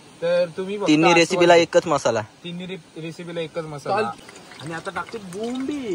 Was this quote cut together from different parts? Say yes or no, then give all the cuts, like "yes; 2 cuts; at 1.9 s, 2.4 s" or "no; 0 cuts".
yes; 1 cut; at 4.1 s